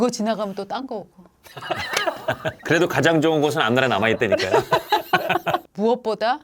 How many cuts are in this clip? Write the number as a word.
two